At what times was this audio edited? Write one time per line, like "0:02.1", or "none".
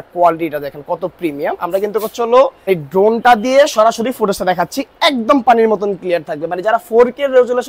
0:02.7